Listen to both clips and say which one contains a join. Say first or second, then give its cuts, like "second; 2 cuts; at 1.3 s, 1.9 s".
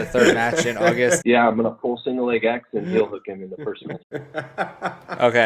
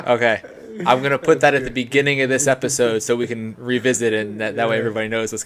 first; 2 cuts; at 1.2 s, 4.0 s